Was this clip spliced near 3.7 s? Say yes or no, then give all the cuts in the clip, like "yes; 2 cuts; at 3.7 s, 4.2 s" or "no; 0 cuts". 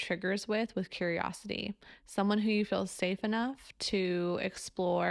no; 0 cuts